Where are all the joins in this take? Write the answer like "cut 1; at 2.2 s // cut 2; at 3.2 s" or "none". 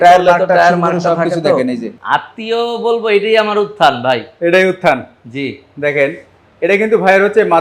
cut 1; at 1.9 s